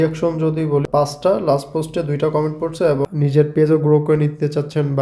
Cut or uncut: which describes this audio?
cut